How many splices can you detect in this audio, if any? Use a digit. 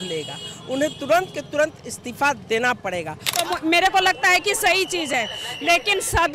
1